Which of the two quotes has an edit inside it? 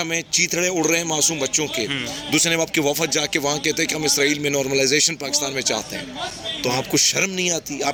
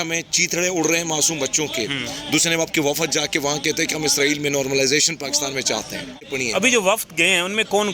second; 1 cut; at 6.3 s

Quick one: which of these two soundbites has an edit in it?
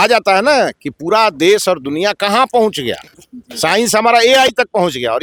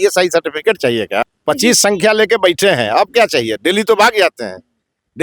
second; 1 cut; at 1.2 s

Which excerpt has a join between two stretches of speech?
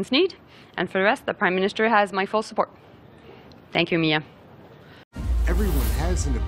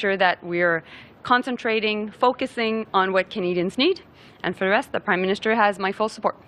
first; 1 cut; at 5.1 s

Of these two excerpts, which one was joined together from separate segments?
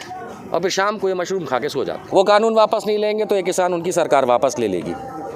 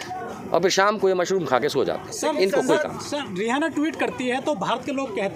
first; 1 cut; at 2.0 s

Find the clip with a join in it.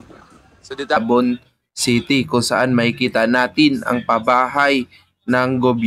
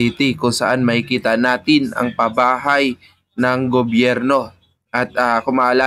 first; 1 cut; at 1.0 s

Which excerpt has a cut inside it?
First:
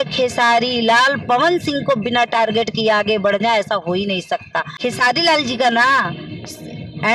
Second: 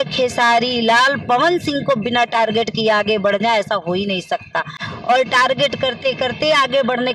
first; 1 cut; at 4.8 s

